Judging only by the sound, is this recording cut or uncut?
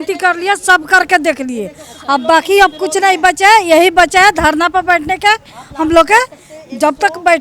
uncut